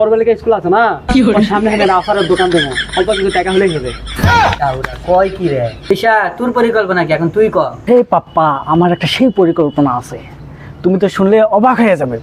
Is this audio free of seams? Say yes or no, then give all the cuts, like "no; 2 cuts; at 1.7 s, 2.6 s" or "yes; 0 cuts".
yes; 0 cuts